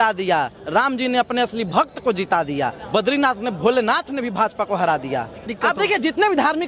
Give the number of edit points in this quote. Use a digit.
2